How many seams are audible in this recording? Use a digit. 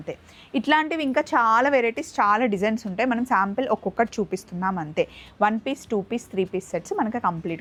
0